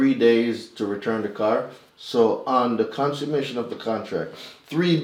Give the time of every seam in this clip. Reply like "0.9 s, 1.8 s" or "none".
1.8 s